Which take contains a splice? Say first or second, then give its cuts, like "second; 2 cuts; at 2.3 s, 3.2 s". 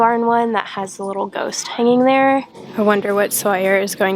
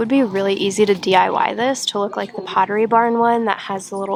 first; 1 cut; at 2.6 s